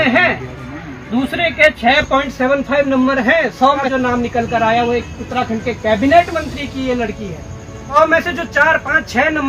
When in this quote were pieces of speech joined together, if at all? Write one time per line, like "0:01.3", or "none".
0:03.9
0:07.9